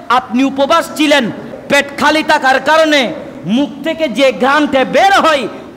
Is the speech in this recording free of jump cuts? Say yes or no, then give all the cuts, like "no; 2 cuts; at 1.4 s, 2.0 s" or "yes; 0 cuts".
no; 2 cuts; at 1.5 s, 3.3 s